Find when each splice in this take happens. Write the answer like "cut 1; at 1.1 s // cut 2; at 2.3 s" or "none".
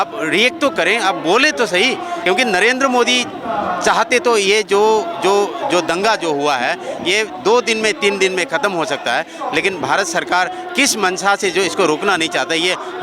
cut 1; at 2.2 s